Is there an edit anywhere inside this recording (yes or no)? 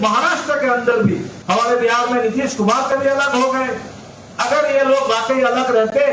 yes